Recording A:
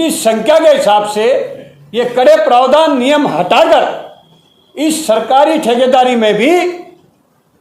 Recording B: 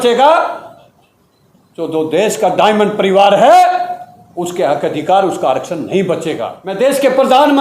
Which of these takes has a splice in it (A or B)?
B